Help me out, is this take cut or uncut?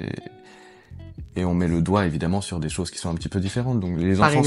uncut